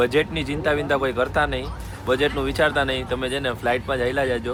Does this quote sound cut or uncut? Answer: uncut